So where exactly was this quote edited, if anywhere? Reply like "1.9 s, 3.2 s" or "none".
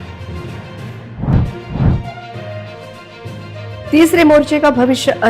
1.1 s